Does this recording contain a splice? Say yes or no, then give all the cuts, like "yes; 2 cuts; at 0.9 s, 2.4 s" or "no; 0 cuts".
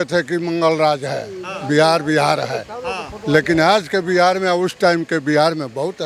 no; 0 cuts